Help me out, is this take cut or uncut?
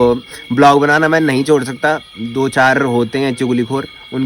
uncut